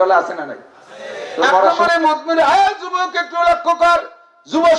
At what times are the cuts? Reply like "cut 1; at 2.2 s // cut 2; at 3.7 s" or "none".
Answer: cut 1; at 1.7 s